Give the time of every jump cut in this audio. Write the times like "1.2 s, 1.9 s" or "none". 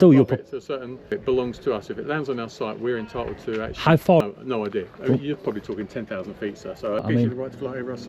1.1 s, 4.2 s, 7.0 s